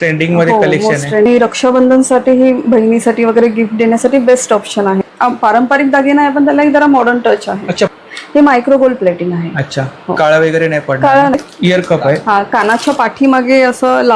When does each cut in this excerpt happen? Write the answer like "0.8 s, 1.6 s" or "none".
1.3 s, 5.1 s, 7.9 s, 11.3 s